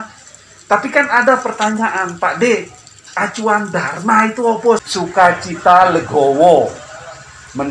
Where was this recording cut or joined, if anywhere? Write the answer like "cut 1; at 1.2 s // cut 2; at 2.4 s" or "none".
cut 1; at 4.8 s